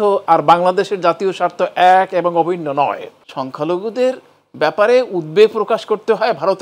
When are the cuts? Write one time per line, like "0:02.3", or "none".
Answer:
0:03.2